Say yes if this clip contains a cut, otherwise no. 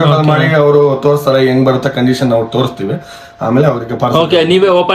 no